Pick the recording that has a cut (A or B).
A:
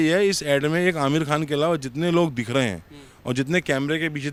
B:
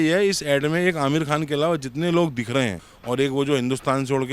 B